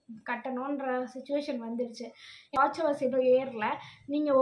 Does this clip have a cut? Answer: yes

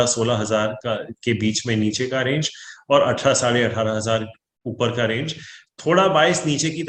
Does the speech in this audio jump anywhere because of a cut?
no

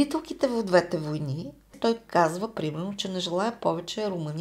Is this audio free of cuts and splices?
no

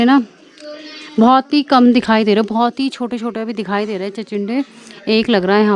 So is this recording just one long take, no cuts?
yes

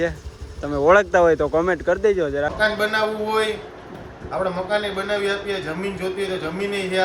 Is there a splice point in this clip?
yes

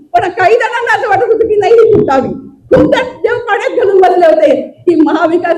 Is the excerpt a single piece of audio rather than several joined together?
yes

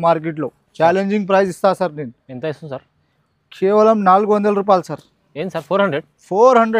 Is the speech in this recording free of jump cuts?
yes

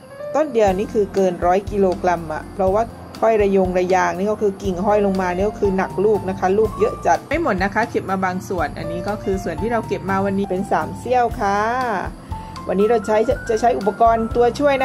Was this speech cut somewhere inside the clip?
yes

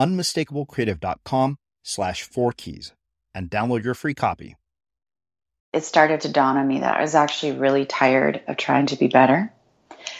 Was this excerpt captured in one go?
no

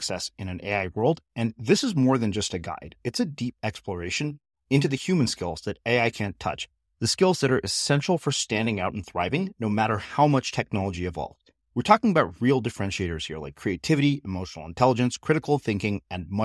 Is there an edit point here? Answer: no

